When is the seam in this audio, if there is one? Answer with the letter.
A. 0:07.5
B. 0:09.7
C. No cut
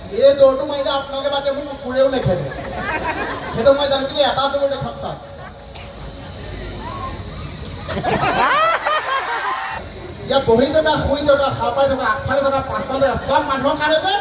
B